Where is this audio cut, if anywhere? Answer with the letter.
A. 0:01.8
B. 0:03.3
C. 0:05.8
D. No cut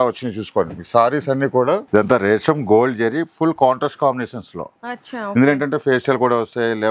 A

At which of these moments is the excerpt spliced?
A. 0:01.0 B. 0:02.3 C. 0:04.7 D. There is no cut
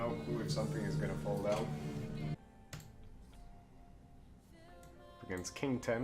B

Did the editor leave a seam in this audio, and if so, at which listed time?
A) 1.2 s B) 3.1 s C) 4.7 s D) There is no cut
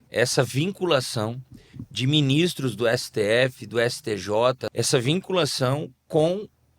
C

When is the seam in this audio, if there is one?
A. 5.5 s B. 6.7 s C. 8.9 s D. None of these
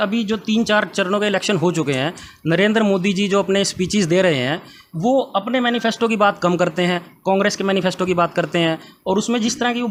D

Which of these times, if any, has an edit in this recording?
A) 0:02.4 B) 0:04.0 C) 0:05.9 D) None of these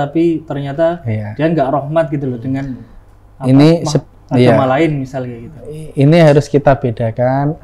D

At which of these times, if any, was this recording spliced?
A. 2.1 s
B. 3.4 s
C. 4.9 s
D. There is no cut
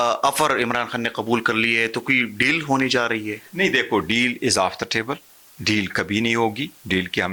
D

